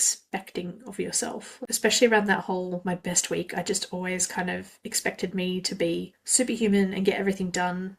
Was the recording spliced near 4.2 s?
no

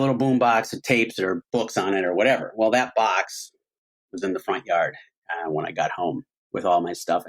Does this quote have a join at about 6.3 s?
yes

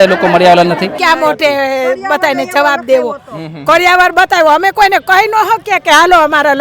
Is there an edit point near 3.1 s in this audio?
no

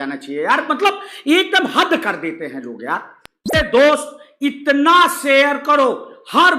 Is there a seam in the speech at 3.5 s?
yes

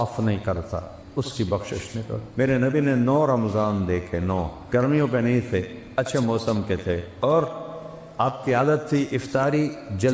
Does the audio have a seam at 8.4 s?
no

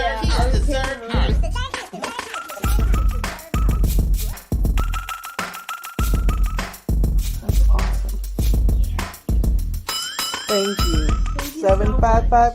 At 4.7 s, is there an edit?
yes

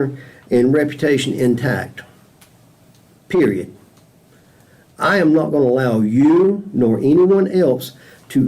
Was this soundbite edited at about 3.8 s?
no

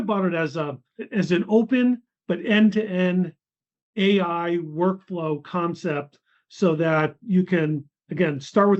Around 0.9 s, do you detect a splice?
yes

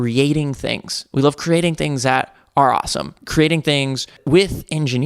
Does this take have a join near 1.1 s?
no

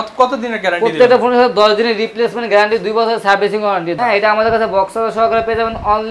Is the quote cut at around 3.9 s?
yes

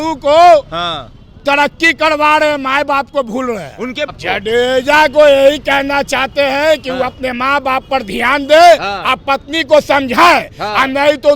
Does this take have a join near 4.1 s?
yes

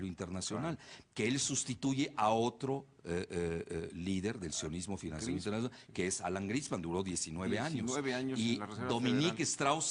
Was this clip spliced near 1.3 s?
yes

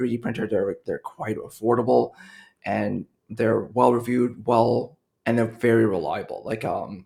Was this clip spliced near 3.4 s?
no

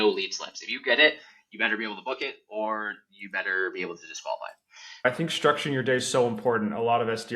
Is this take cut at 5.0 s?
yes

